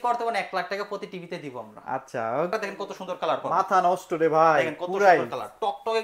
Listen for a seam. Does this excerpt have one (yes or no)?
yes